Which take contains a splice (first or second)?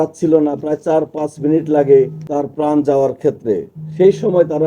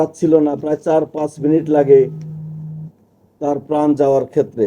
first